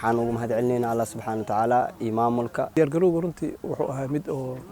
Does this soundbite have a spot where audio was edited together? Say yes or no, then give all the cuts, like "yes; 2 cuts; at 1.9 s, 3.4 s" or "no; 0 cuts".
yes; 1 cut; at 2.7 s